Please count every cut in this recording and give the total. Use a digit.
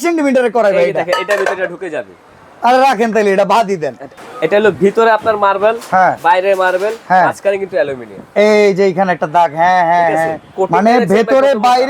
2